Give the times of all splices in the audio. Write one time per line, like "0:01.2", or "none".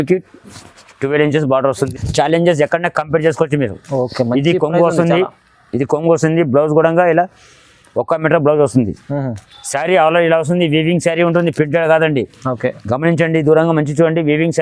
0:01.9